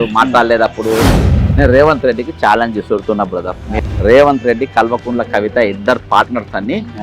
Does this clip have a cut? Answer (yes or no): yes